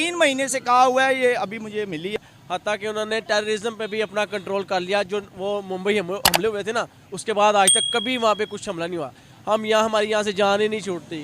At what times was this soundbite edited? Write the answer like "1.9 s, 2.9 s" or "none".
2.2 s